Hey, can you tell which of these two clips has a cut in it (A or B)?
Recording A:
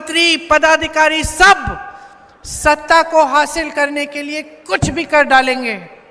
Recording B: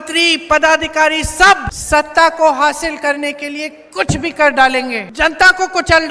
B